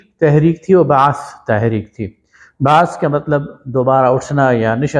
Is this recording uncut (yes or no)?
yes